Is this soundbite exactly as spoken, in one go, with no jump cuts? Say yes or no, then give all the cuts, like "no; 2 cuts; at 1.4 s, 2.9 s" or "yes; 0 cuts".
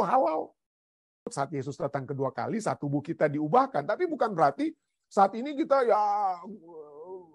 no; 1 cut; at 1.0 s